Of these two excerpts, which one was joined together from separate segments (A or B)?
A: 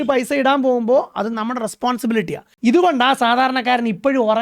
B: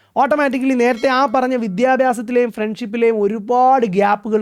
A